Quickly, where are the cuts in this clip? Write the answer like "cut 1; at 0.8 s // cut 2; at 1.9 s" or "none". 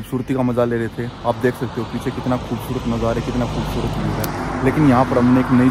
none